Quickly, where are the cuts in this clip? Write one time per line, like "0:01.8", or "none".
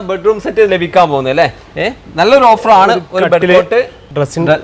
none